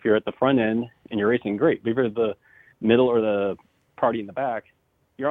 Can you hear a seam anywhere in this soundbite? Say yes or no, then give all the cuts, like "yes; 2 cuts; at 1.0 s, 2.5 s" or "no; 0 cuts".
no; 0 cuts